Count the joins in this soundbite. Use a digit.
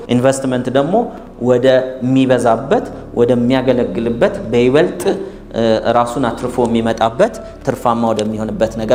0